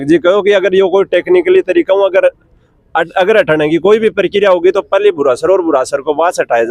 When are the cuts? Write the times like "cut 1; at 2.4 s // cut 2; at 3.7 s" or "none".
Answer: none